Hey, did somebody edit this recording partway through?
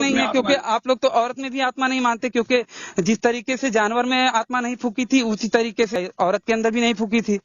yes; 1 cut; at 5.9 s

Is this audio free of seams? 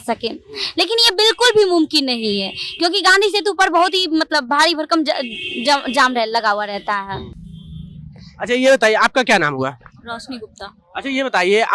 yes; 0 cuts

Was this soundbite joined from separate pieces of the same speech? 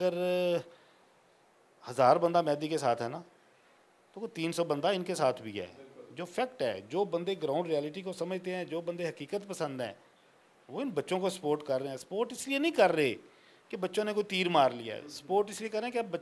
no; 0 cuts

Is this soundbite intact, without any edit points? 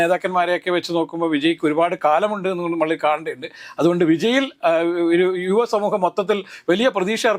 yes; 0 cuts

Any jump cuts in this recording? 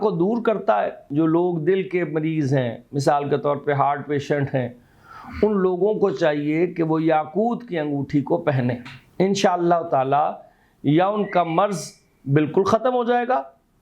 yes; 1 cut; at 1.0 s

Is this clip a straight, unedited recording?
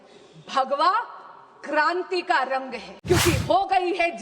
no; 1 cut; at 2.9 s

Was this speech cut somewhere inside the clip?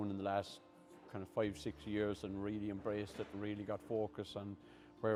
no; 0 cuts

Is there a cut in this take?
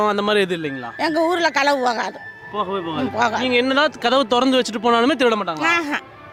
no; 0 cuts

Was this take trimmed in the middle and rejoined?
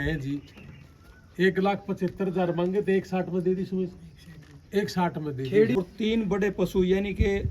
yes; 1 cut; at 5.8 s

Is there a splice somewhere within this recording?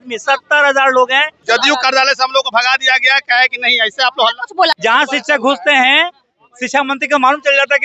yes; 2 cuts; at 1.4 s, 4.8 s

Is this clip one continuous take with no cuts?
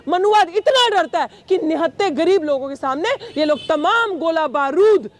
yes; 0 cuts

